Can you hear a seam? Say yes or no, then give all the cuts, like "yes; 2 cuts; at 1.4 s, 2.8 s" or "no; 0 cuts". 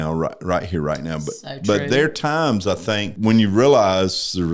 yes; 1 cut; at 3.2 s